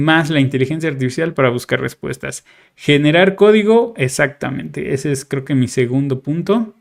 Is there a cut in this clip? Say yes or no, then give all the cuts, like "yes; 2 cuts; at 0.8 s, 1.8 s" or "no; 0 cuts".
no; 0 cuts